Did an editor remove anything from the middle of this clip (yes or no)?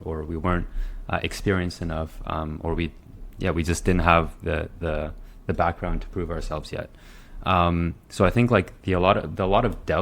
no